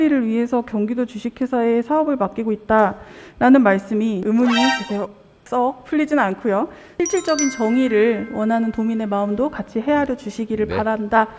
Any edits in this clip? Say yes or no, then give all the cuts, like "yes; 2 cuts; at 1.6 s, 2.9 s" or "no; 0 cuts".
yes; 1 cut; at 6.8 s